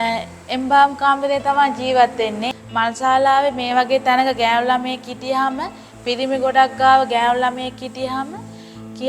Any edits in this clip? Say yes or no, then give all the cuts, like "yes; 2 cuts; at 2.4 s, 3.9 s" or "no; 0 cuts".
yes; 1 cut; at 2.5 s